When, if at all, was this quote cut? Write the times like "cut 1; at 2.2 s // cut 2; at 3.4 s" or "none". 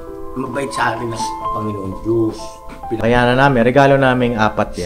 cut 1; at 3.0 s